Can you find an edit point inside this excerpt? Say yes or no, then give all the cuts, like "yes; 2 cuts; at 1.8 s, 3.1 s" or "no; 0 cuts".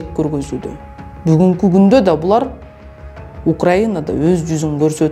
no; 0 cuts